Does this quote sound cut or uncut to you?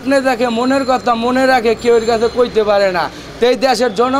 uncut